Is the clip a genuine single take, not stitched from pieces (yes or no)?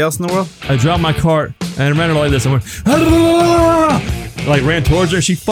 no